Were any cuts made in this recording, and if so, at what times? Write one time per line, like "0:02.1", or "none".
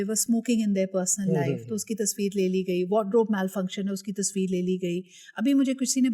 none